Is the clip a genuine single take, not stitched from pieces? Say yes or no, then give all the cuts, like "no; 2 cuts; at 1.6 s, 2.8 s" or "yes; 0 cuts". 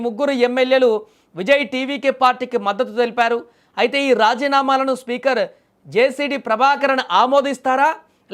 yes; 0 cuts